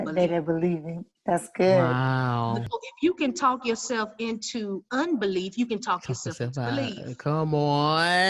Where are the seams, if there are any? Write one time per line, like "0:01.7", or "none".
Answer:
0:02.7